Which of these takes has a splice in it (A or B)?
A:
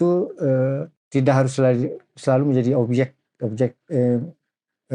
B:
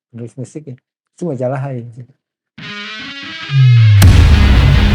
A